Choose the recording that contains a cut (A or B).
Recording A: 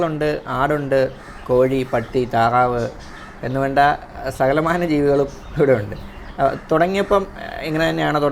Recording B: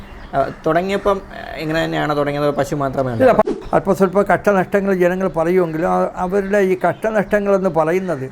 B